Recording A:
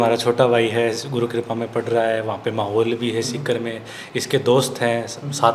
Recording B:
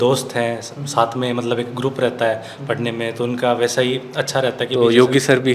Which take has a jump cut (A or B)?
B